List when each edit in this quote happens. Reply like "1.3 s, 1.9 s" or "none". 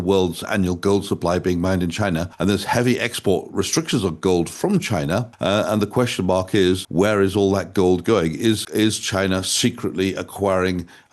2.3 s, 5.3 s, 6.8 s, 8.6 s